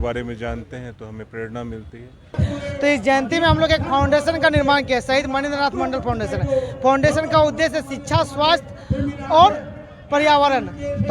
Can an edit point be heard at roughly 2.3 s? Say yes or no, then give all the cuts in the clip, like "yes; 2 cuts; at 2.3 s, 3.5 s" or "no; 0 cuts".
yes; 1 cut; at 2.3 s